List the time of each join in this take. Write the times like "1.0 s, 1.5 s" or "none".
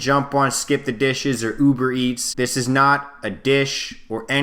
2.2 s